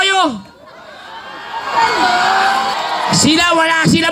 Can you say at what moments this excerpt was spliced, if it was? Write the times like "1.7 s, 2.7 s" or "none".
2.7 s